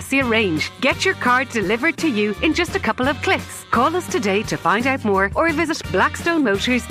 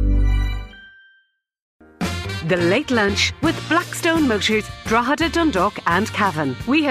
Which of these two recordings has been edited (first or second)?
second